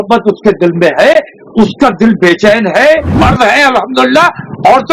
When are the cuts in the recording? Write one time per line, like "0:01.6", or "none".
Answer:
0:03.1